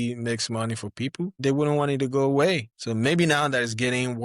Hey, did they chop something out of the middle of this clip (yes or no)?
yes